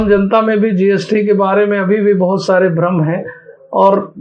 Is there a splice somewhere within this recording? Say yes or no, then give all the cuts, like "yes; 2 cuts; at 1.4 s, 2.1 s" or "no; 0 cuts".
no; 0 cuts